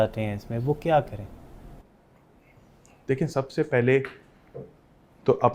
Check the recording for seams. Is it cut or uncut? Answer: uncut